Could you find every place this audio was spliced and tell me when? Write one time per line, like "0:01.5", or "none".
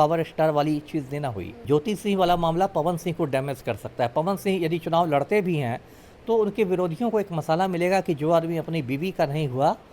0:01.5